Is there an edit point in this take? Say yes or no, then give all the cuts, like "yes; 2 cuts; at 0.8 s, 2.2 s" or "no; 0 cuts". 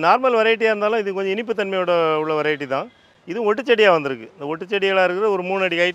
no; 0 cuts